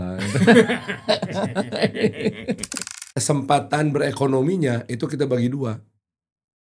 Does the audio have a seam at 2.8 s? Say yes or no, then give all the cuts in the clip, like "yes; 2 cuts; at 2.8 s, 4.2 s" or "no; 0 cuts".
yes; 1 cut; at 2.8 s